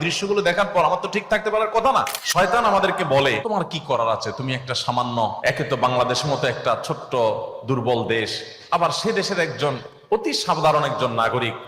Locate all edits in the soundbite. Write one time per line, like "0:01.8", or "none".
0:02.2
0:03.4
0:05.4